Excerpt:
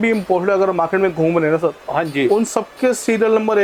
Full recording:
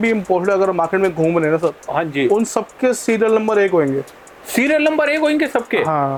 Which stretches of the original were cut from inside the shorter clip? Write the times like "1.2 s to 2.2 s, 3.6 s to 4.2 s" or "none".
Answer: none